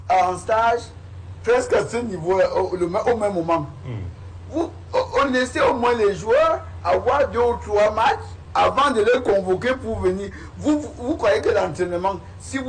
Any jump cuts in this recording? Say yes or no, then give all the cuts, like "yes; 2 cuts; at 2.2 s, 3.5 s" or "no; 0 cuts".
no; 0 cuts